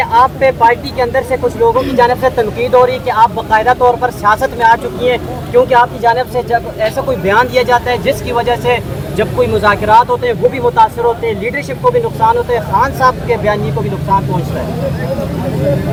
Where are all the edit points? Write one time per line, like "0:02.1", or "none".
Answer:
none